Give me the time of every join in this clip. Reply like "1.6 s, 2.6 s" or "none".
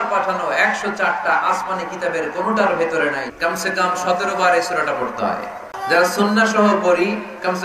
3.2 s, 5.8 s